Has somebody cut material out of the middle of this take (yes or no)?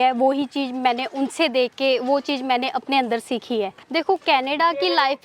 yes